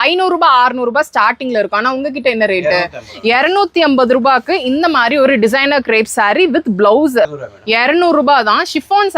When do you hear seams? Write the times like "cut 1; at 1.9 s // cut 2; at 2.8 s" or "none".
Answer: cut 1; at 7.4 s